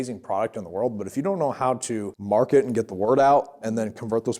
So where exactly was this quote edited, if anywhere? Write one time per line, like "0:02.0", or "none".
0:02.1

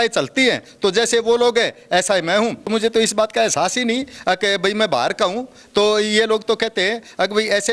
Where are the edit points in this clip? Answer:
0:02.7

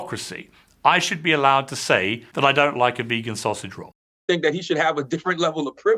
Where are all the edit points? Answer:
0:02.2
0:04.2

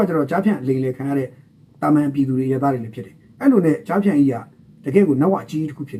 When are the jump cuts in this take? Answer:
none

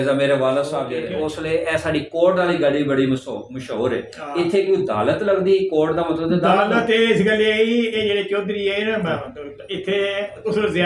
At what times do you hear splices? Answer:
0:01.0

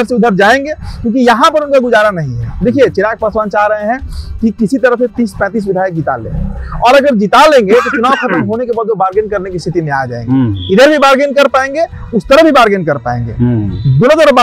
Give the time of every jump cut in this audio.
none

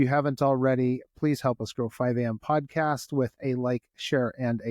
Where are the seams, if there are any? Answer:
none

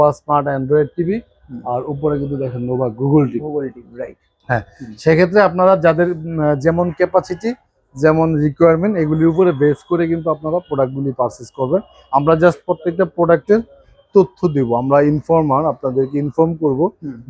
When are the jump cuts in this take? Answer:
none

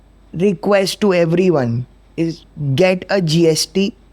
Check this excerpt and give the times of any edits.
none

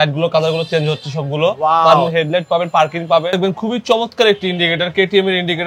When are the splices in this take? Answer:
0:02.1
0:03.3

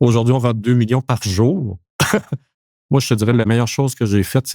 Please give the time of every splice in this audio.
0:02.4
0:03.5

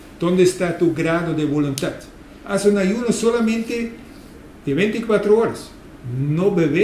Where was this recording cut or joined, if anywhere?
none

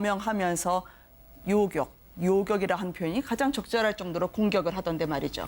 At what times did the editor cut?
0:02.9

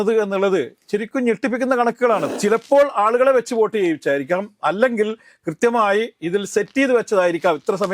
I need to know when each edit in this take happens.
0:02.2

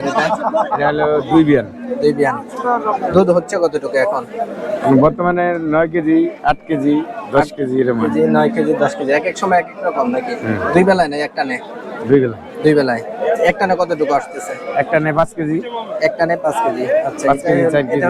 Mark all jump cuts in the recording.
none

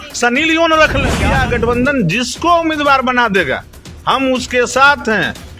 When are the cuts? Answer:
0:01.2

